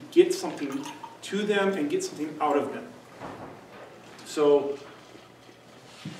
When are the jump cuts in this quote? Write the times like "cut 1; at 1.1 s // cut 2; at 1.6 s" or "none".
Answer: none